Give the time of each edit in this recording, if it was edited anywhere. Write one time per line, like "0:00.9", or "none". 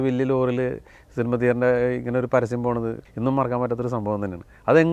0:03.0